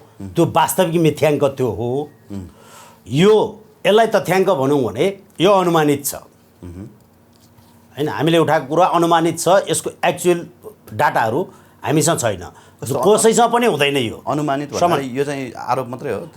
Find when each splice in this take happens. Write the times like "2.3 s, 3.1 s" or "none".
none